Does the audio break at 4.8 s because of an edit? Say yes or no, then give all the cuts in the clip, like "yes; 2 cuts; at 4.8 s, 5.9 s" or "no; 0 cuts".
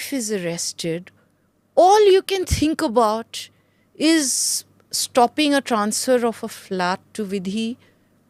no; 0 cuts